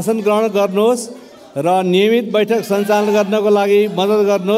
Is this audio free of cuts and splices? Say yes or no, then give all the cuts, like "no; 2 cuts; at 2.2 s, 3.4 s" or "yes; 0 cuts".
yes; 0 cuts